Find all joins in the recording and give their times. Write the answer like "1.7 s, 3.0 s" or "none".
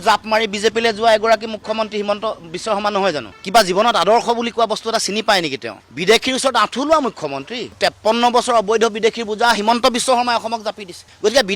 3.3 s, 5.7 s, 7.8 s